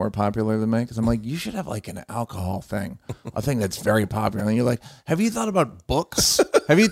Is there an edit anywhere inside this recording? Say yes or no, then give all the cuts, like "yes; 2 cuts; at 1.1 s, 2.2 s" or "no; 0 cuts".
no; 0 cuts